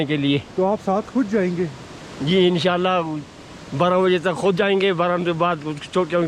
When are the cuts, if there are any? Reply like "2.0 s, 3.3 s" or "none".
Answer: none